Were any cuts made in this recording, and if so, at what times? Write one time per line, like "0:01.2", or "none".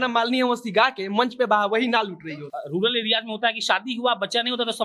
0:02.5